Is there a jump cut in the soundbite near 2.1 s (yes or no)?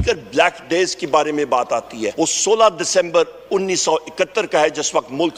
yes